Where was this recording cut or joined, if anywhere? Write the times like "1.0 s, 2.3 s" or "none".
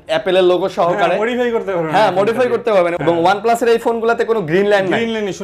3.0 s